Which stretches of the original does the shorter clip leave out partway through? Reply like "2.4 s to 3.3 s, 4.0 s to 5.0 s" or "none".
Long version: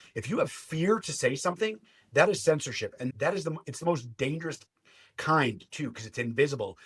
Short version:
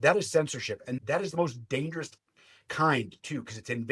3.4 s to 3.8 s